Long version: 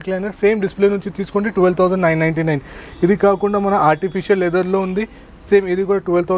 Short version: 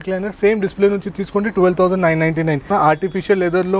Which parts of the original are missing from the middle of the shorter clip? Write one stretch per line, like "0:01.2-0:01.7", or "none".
0:02.7-0:03.7